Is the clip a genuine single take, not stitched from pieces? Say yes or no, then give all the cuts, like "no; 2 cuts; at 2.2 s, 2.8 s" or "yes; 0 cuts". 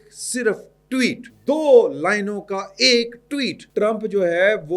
no; 2 cuts; at 1.3 s, 3.6 s